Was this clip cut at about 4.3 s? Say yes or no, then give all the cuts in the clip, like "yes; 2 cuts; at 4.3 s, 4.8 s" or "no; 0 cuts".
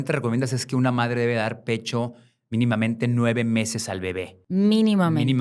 yes; 1 cut; at 4.3 s